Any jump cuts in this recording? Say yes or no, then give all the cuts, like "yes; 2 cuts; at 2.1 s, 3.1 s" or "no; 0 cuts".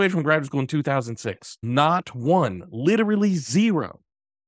yes; 1 cut; at 1.5 s